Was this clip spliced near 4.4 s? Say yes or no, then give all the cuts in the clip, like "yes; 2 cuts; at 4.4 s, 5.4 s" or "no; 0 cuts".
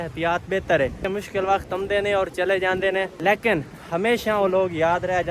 no; 2 cuts; at 1.1 s, 3.1 s